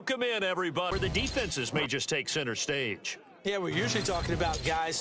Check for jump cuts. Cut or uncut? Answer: cut